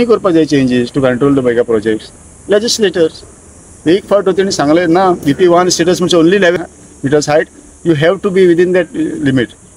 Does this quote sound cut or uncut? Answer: cut